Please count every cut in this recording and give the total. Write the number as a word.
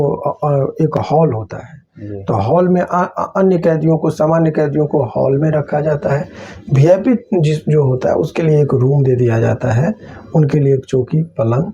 zero